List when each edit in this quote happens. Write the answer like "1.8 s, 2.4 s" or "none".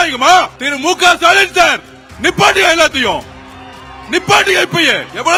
none